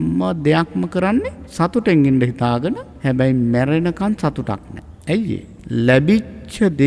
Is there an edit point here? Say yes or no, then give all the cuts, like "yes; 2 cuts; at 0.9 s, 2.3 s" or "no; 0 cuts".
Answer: yes; 3 cuts; at 1.4 s, 2.9 s, 5.5 s